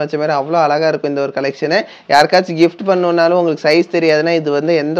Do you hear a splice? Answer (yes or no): no